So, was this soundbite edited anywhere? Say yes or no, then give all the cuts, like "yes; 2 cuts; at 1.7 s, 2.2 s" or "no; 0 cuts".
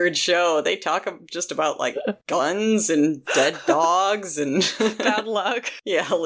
no; 0 cuts